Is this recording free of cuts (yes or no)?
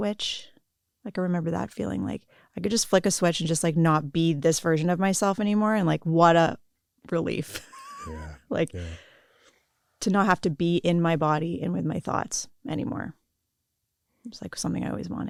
yes